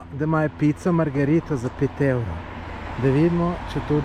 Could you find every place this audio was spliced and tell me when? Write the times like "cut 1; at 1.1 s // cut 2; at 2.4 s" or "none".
none